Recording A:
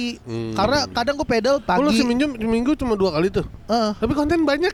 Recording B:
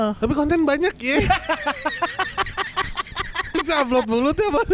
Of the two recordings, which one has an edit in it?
B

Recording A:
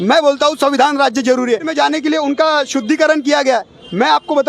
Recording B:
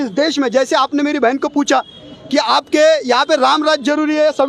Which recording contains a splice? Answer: A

